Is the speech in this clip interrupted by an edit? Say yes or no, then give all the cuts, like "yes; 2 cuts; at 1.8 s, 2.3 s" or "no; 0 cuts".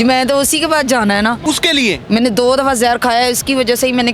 yes; 1 cut; at 1.4 s